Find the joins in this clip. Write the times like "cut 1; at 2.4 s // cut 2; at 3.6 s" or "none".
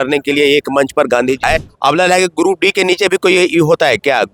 cut 1; at 1.4 s